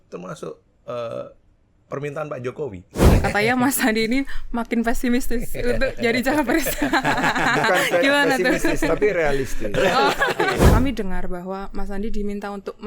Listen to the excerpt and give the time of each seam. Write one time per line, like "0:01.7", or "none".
0:02.9
0:10.7